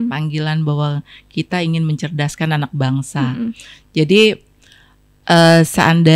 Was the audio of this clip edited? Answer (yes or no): no